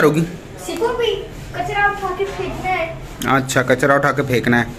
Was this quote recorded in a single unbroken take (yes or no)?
yes